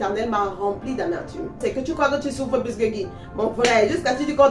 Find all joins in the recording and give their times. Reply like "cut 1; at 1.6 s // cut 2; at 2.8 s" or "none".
cut 1; at 1.6 s

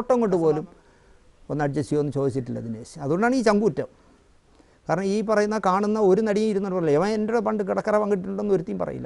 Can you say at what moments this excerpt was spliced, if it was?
none

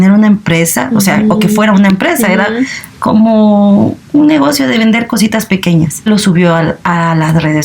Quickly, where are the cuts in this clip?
cut 1; at 6.1 s

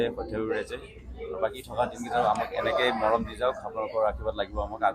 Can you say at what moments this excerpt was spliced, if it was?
none

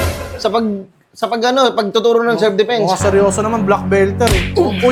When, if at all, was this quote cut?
none

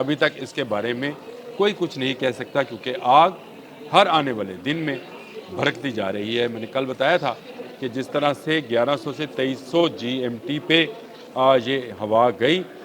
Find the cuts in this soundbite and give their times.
none

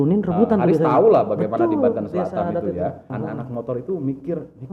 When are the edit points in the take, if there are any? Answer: cut 1; at 3.1 s

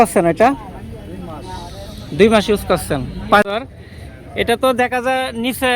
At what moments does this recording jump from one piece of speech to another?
cut 1; at 3.5 s

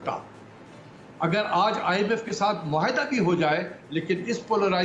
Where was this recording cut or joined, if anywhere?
none

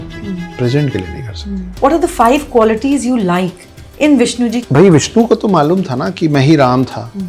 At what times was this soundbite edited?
cut 1; at 1.7 s // cut 2; at 4.6 s

